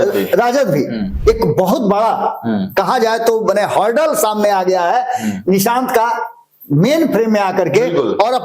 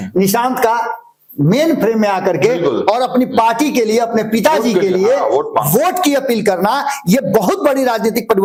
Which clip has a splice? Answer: first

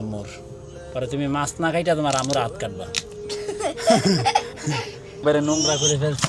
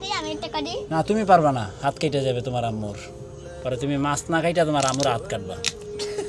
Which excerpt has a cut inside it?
first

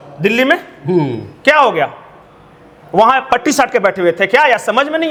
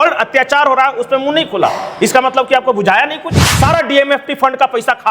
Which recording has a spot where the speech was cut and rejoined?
second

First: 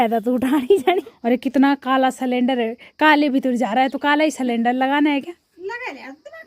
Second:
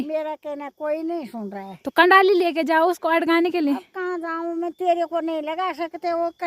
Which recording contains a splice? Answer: first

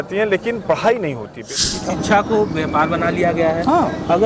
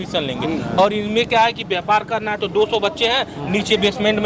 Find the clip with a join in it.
first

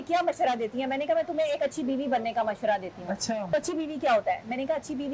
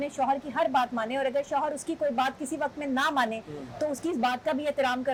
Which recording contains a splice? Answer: first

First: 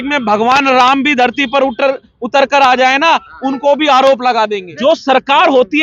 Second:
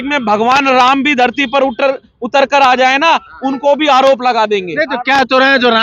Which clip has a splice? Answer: first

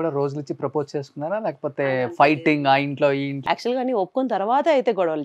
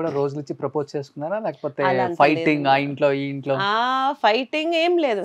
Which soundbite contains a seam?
first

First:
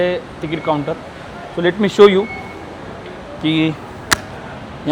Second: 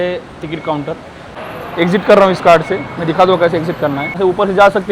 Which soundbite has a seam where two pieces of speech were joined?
second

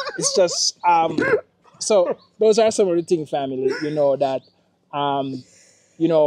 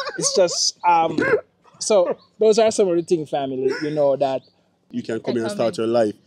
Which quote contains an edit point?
second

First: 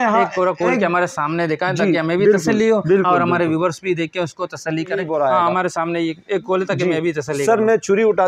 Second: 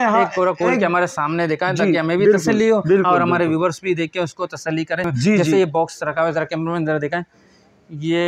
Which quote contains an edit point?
first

